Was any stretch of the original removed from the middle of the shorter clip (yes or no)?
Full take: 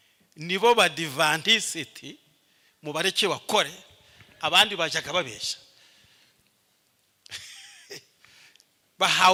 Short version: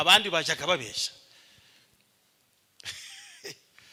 no